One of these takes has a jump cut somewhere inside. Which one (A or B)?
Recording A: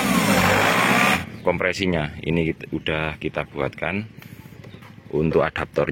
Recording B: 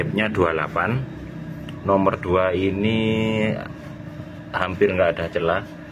A